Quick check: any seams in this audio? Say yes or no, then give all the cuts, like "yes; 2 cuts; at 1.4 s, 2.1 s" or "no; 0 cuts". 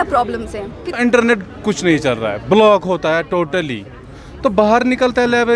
yes; 1 cut; at 1.0 s